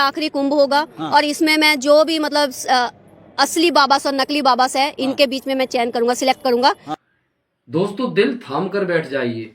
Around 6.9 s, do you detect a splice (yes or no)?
yes